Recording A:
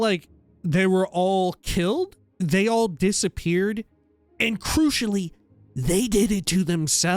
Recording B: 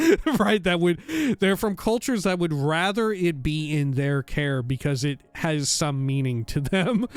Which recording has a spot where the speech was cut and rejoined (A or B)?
A